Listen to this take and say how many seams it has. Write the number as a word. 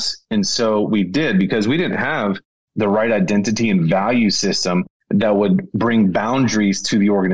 one